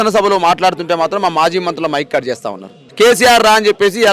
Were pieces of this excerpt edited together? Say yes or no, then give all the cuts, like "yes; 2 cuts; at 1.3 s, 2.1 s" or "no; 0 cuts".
yes; 1 cut; at 2.8 s